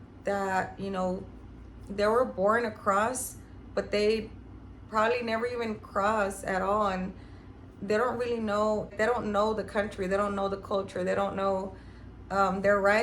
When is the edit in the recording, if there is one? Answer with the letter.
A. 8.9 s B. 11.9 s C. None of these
A